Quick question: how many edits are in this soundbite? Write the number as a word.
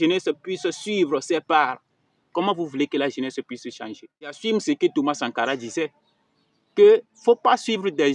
one